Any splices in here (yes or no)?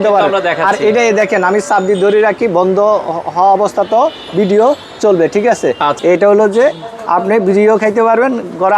yes